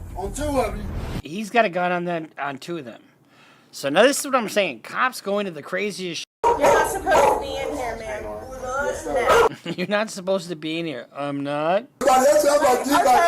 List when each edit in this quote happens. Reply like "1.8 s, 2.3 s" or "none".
6.4 s, 12.0 s